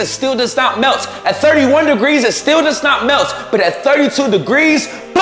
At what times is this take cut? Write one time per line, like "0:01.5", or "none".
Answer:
none